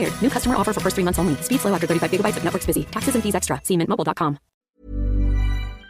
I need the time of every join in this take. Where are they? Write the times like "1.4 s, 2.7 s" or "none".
4.5 s

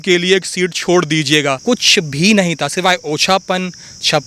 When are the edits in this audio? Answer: 1.6 s

